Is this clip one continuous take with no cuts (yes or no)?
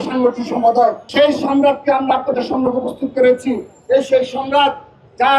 no